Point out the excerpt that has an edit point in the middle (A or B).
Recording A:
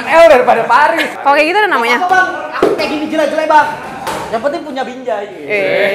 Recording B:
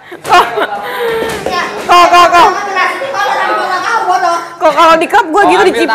A